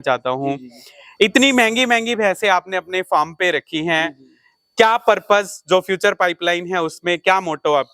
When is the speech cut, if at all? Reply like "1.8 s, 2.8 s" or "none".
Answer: none